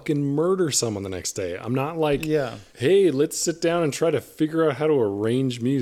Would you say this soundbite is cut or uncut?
cut